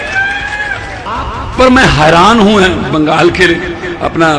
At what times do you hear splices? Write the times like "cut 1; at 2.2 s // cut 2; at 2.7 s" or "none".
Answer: cut 1; at 1.1 s